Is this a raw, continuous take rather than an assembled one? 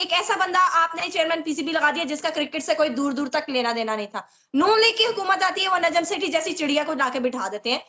yes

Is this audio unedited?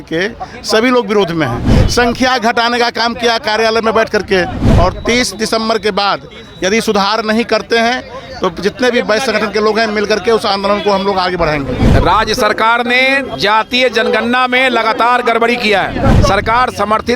no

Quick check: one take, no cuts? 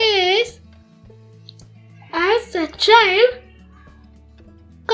yes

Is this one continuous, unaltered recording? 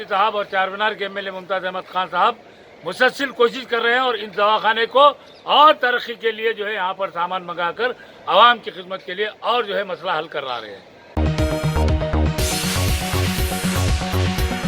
no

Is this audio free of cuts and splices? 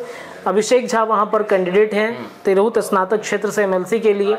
yes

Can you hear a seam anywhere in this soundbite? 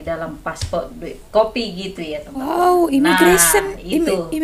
no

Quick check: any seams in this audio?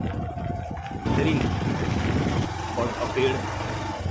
yes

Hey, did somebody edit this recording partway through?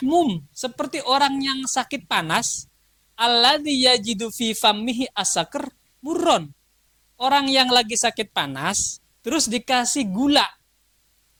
no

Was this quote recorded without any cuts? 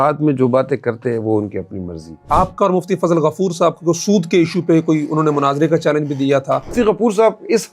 no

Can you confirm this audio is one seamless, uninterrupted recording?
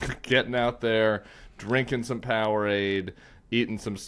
yes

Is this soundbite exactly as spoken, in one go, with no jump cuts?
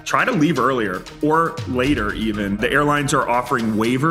no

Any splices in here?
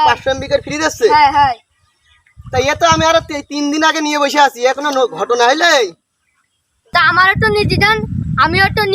yes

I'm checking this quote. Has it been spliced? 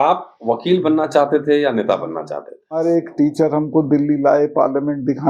yes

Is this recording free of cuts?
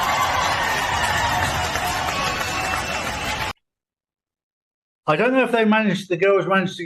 no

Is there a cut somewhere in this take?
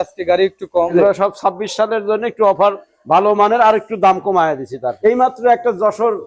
yes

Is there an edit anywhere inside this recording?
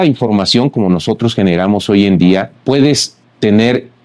yes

